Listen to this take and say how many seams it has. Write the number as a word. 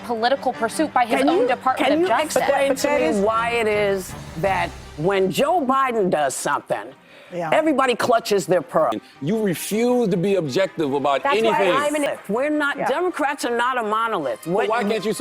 two